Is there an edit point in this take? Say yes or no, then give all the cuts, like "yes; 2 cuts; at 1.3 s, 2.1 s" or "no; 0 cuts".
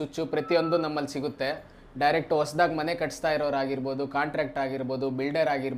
no; 0 cuts